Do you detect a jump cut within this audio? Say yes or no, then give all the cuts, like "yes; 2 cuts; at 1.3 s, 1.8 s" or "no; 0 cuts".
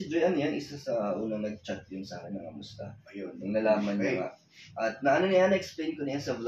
no; 0 cuts